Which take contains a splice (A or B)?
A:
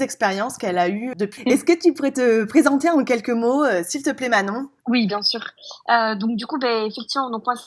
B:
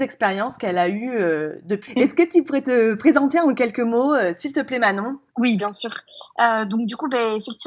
A